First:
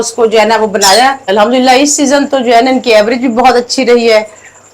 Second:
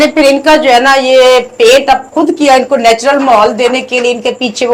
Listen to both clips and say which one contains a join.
first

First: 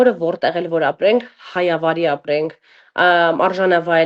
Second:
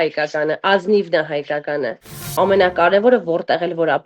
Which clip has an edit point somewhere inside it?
second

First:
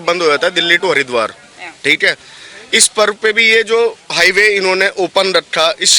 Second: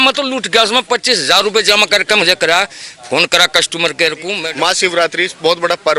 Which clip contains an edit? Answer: second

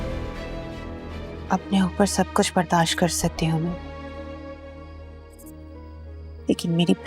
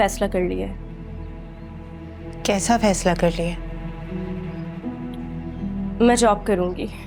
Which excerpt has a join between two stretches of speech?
first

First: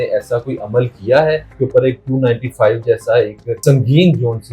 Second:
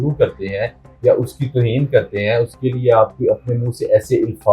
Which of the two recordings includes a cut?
first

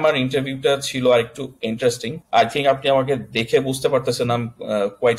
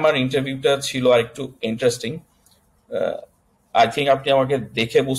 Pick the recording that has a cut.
first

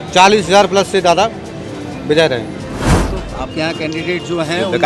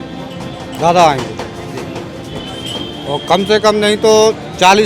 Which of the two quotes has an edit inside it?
first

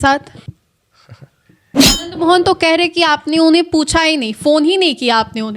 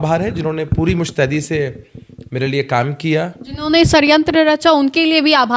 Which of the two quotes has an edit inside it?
first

